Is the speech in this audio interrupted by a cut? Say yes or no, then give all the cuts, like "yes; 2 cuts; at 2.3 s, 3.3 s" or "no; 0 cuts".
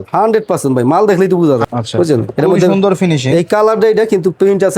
yes; 1 cut; at 1.6 s